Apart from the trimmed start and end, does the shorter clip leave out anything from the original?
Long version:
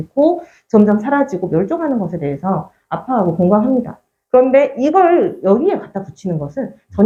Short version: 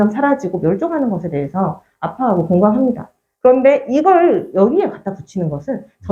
no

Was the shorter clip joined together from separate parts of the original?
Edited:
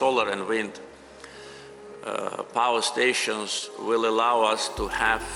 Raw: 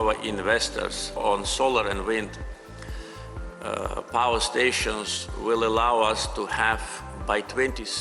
no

